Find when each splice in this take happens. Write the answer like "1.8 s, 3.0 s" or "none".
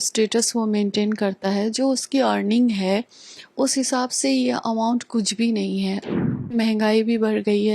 6.5 s